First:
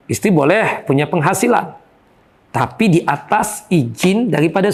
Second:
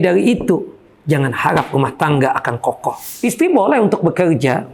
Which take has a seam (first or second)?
second